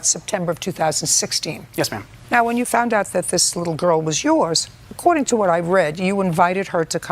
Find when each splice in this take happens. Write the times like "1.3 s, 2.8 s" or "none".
1.9 s